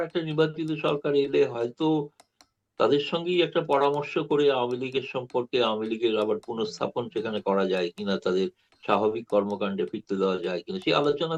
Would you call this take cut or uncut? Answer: uncut